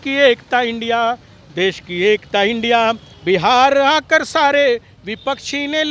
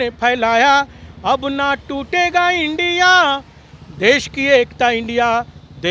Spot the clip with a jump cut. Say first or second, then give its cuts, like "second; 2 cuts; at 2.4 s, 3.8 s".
first; 1 cut; at 3.1 s